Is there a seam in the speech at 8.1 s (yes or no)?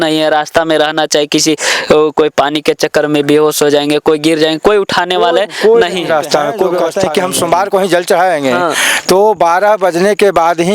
no